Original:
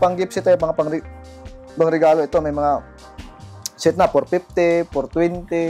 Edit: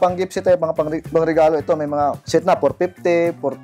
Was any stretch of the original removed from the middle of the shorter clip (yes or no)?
yes